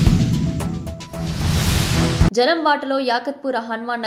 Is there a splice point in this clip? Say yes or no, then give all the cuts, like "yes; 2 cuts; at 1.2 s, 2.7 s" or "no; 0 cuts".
no; 0 cuts